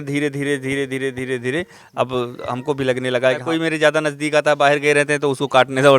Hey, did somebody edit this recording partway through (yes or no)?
yes